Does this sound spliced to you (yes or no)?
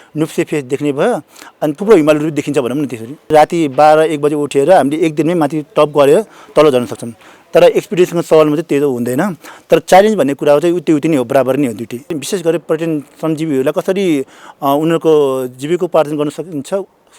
yes